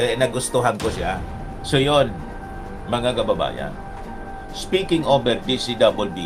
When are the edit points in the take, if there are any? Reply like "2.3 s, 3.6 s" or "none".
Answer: 1.5 s